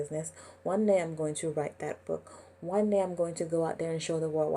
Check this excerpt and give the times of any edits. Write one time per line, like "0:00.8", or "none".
none